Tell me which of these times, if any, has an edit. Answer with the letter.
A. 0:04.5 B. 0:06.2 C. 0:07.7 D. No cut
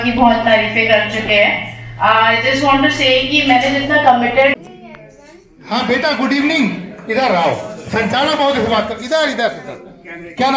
A